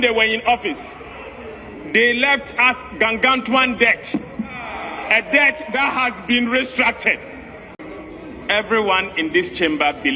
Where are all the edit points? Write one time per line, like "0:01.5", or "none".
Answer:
0:07.8